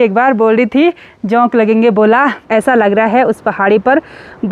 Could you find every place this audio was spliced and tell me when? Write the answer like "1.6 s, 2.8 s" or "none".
2.4 s